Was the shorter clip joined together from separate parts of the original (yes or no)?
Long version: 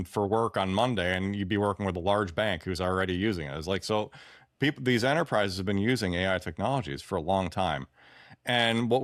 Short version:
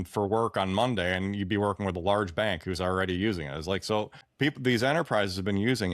yes